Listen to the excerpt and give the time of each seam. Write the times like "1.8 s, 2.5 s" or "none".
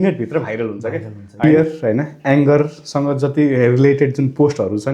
1.4 s